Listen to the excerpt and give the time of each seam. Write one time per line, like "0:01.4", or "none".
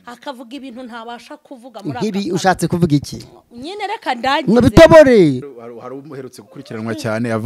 0:05.5